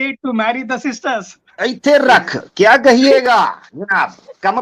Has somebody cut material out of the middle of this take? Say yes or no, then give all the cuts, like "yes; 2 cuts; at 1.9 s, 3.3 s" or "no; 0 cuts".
yes; 1 cut; at 1.4 s